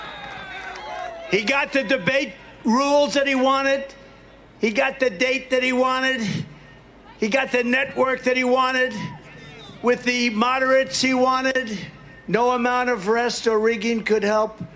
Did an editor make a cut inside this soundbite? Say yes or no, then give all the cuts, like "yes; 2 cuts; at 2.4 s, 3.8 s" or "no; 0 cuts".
no; 0 cuts